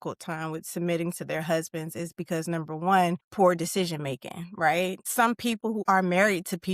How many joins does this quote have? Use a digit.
2